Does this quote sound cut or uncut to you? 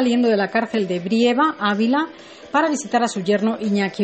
cut